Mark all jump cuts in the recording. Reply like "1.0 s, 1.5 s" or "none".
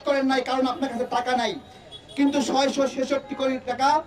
2.4 s